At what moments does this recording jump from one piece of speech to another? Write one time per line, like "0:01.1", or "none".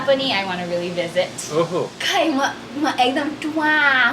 0:02.0